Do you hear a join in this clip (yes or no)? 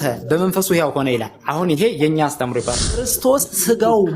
yes